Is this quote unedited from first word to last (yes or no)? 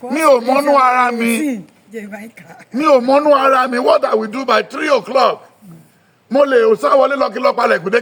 yes